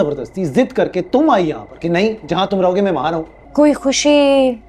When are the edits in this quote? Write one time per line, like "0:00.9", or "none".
0:03.4